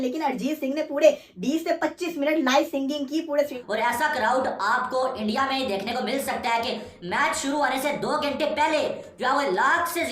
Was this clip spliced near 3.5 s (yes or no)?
yes